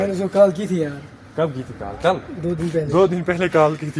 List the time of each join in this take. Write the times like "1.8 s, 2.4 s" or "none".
none